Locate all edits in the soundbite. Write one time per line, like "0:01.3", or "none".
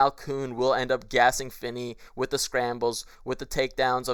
none